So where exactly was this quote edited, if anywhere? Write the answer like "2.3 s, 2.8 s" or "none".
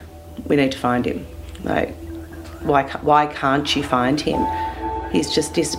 4.9 s